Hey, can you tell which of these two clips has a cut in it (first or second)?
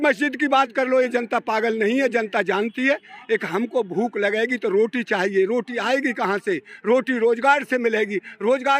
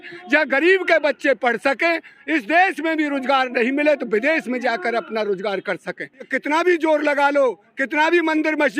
second